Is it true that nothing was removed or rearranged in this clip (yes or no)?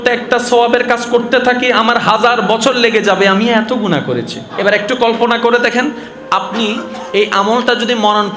no